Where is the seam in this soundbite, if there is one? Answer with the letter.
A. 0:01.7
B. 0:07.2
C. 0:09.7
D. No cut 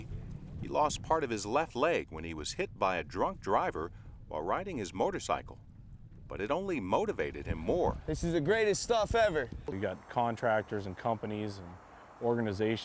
C